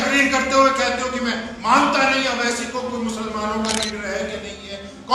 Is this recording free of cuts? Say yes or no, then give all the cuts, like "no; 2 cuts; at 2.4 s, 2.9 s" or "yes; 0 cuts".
yes; 0 cuts